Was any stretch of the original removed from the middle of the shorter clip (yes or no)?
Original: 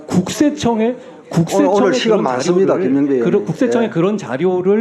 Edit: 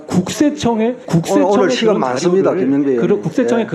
yes